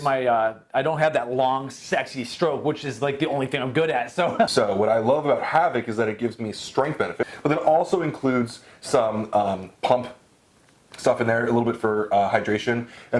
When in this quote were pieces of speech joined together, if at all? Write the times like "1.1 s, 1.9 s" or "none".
4.5 s, 7.3 s